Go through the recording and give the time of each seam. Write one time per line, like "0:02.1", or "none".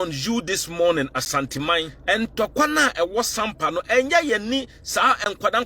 0:01.9